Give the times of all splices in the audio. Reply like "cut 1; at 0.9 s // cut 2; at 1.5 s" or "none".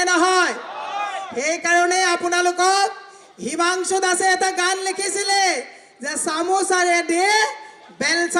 none